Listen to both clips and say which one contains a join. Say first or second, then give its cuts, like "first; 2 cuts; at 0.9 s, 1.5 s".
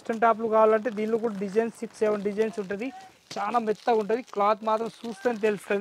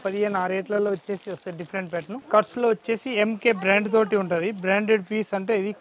second; 1 cut; at 2.2 s